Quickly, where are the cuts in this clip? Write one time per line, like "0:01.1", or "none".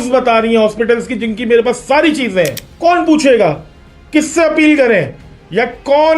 0:02.6